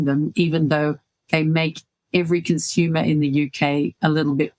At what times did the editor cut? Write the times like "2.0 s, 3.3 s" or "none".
1.4 s